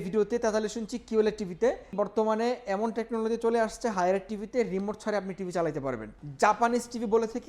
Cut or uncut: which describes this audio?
cut